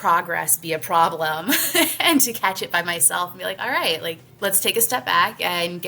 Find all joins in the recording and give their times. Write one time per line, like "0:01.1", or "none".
0:04.3

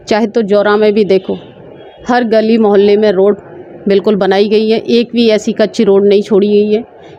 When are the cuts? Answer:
none

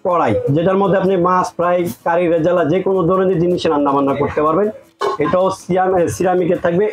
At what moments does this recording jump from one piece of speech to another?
none

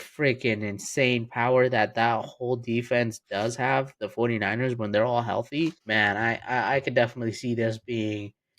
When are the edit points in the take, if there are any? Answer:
0:05.8

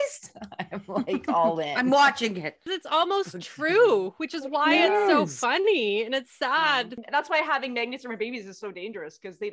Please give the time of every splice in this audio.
0:02.7
0:07.0

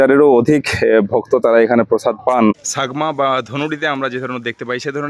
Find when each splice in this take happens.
0:02.7

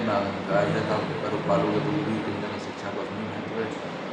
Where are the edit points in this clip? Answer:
none

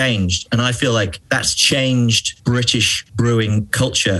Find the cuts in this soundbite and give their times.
0:01.2
0:02.3

